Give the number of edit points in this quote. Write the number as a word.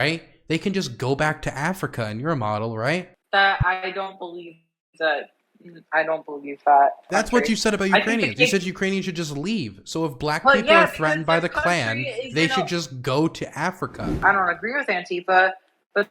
three